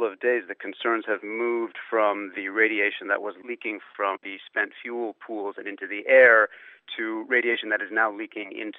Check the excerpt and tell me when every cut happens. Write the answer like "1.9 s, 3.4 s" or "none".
none